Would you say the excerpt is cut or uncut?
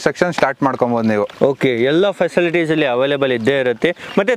uncut